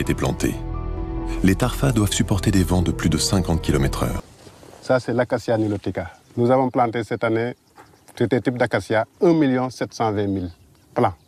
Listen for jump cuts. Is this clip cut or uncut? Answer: cut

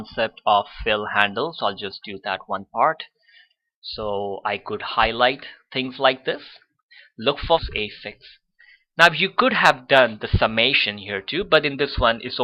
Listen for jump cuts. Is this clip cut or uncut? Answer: uncut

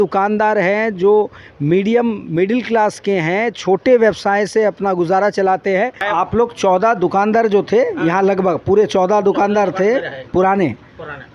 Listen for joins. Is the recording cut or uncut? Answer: cut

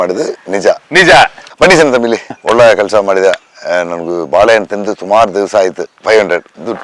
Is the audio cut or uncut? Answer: cut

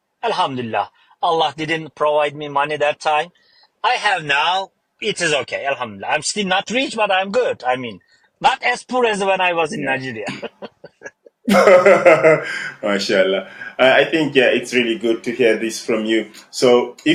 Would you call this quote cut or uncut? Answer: uncut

